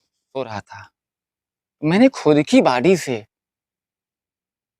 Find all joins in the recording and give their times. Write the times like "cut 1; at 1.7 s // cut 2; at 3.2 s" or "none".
none

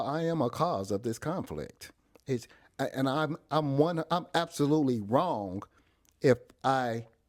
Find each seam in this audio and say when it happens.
none

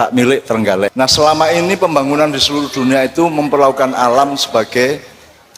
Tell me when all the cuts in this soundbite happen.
cut 1; at 0.9 s

